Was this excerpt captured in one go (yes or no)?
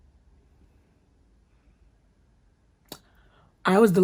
yes